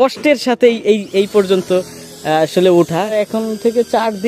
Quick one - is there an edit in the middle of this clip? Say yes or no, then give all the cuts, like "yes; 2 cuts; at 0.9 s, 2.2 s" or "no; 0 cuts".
yes; 1 cut; at 3.1 s